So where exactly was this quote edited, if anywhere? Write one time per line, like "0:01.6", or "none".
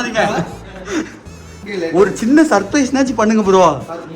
0:01.7